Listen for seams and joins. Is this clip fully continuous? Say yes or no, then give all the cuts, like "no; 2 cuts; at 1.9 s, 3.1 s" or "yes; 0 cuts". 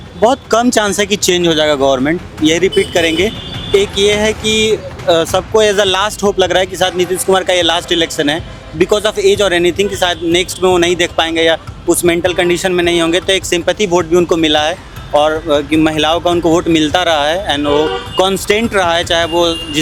yes; 0 cuts